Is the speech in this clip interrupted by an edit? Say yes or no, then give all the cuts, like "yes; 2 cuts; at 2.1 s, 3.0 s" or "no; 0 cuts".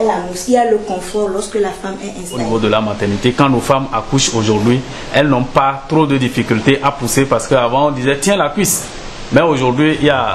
yes; 1 cut; at 2.4 s